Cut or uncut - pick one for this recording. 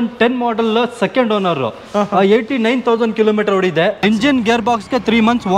cut